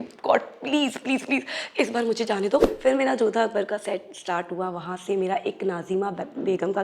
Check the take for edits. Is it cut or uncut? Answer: cut